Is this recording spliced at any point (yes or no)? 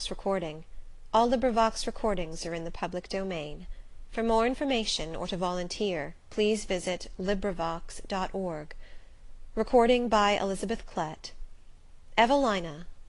no